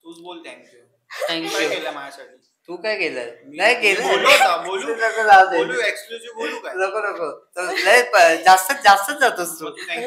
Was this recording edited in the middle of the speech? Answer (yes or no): no